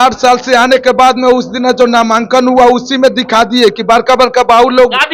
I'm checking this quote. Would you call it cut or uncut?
uncut